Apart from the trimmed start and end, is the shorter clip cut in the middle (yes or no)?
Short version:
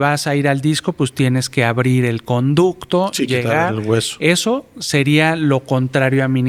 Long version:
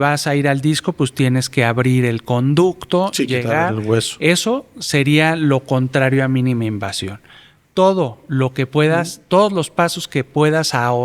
no